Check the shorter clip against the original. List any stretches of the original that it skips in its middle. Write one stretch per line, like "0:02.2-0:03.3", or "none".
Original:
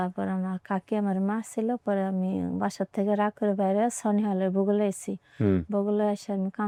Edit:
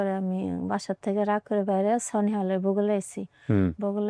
none

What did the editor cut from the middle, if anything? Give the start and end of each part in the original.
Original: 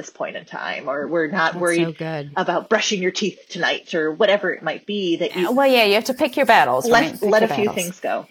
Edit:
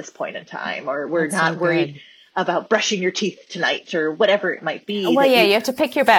0:05.1-0:05.5

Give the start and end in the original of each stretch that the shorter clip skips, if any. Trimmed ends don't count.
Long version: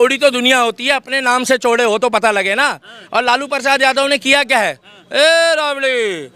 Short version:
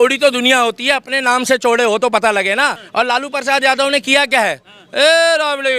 0:02.8-0:03.0

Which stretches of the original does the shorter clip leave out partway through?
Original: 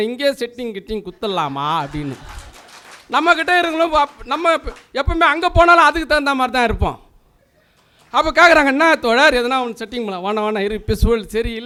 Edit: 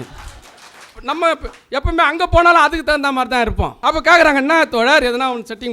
0:03.0-0:04.2
0:07.0-0:08.1

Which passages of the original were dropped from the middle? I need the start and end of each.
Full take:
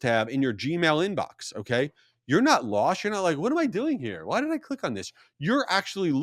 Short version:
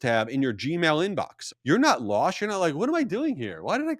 0:01.5-0:02.1

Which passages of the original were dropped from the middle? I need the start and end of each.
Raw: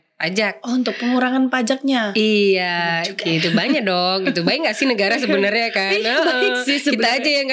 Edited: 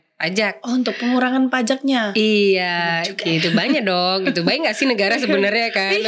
none

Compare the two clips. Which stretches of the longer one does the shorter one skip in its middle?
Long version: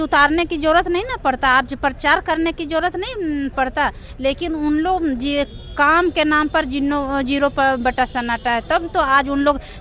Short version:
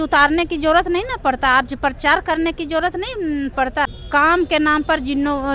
0:04.0-0:05.6

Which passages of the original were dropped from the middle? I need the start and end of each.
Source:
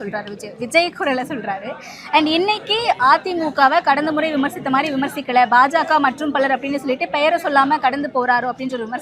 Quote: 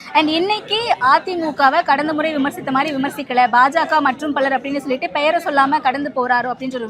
none

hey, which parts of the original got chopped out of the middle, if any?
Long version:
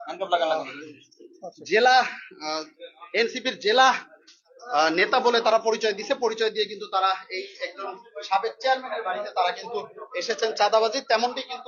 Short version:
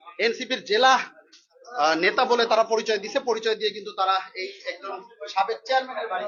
none

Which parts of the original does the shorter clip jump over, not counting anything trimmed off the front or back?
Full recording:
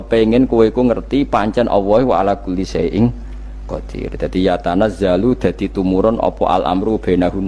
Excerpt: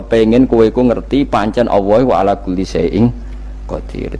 none

